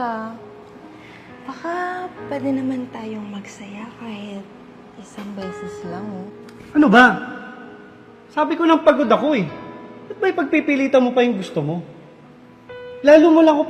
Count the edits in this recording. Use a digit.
1